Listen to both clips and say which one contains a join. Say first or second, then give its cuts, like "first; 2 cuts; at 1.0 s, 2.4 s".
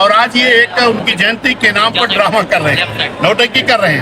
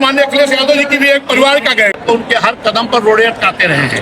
second; 1 cut; at 2.0 s